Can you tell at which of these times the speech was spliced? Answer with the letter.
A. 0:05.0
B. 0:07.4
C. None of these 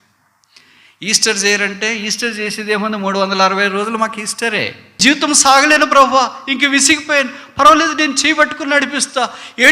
A